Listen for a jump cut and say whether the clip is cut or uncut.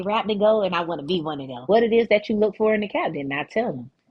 cut